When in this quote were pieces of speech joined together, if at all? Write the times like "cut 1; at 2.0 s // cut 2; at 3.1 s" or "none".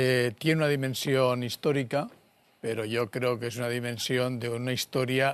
none

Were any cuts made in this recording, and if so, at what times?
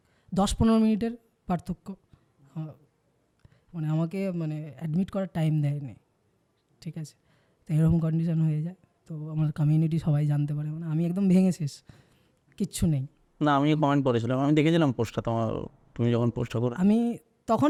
none

